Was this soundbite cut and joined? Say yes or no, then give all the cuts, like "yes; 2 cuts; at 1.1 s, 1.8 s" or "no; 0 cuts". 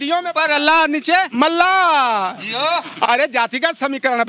no; 0 cuts